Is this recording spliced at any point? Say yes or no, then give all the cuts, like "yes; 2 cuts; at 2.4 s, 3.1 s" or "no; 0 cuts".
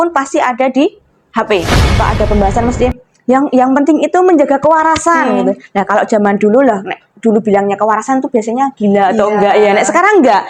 yes; 1 cut; at 2.0 s